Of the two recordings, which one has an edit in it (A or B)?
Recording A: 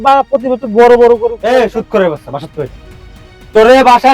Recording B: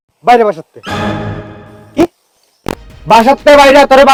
A